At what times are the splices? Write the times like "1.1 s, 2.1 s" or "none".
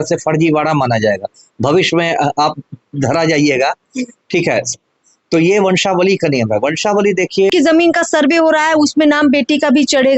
7.5 s